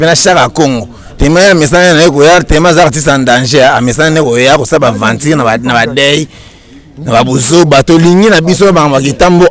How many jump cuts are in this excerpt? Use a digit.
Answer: 0